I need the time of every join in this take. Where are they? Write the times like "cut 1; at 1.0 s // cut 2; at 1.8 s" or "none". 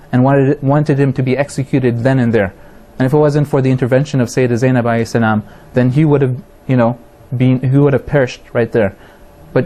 cut 1; at 5.9 s